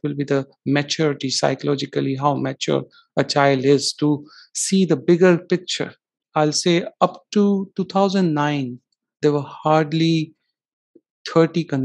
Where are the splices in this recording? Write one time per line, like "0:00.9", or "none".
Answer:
0:06.2